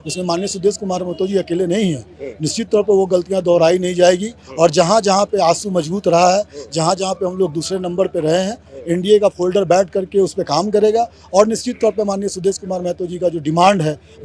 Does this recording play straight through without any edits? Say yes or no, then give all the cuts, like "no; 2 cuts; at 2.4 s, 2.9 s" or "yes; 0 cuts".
yes; 0 cuts